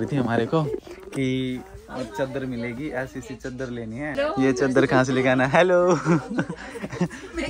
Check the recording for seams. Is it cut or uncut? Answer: cut